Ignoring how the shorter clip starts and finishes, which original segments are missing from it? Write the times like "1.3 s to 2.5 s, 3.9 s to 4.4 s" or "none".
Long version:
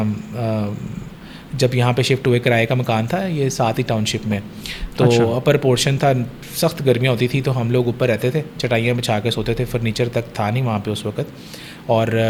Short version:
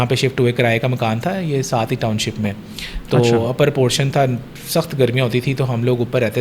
none